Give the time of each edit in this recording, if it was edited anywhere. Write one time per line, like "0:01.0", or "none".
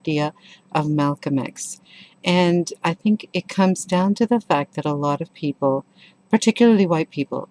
0:05.9